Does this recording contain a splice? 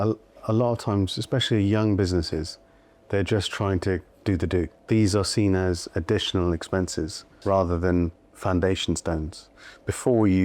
yes; 3 cuts; at 4.8 s, 7.4 s, 9.4 s

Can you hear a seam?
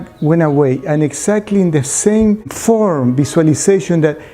yes; 1 cut; at 2.5 s

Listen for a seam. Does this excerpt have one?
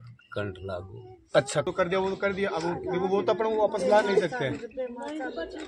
yes; 1 cut; at 1.7 s

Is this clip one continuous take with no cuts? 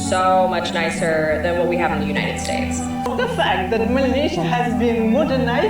no; 1 cut; at 3.1 s

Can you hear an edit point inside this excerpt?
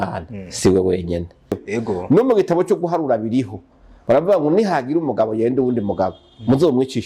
yes; 1 cut; at 1.6 s

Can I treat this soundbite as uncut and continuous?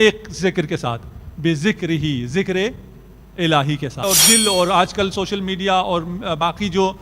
no; 1 cut; at 4.0 s

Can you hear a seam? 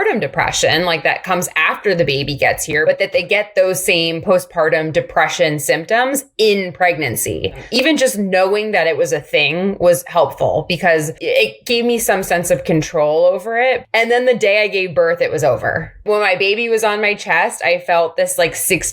yes; 5 cuts; at 2.8 s, 7.7 s, 11.2 s, 13.8 s, 16.0 s

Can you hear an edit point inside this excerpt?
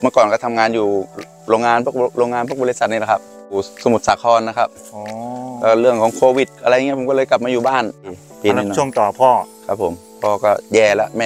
yes; 2 cuts; at 3.7 s, 8.2 s

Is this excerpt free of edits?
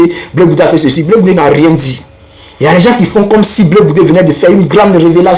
yes; 0 cuts

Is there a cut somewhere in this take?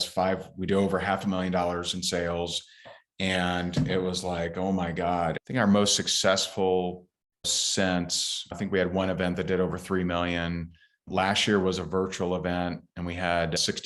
yes; 1 cut; at 5.4 s

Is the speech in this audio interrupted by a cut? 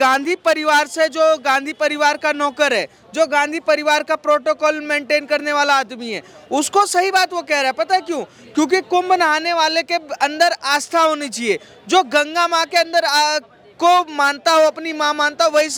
no; 0 cuts

